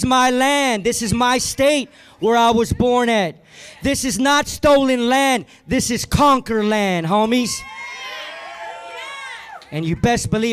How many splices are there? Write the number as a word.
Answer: one